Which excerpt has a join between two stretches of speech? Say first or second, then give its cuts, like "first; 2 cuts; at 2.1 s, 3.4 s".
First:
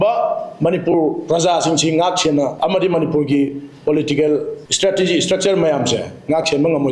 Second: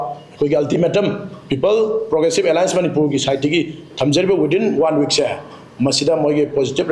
first; 2 cuts; at 2.5 s, 4.6 s